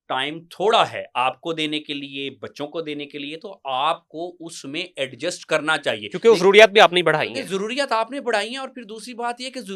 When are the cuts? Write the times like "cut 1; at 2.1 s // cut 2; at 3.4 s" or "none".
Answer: none